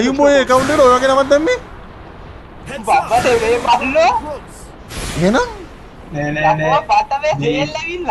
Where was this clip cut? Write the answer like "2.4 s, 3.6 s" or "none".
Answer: none